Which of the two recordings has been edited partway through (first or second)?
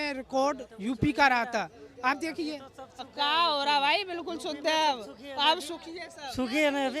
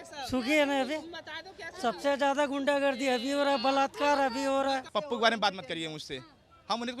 second